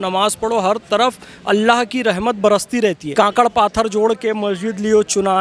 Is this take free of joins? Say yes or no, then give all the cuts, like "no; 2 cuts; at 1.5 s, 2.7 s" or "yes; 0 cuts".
no; 1 cut; at 3.0 s